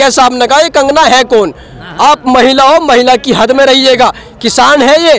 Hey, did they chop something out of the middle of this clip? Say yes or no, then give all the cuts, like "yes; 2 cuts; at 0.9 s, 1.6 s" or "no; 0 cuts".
no; 0 cuts